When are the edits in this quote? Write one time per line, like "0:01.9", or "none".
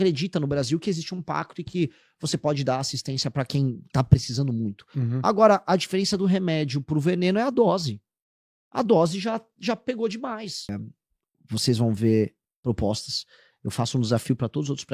0:11.0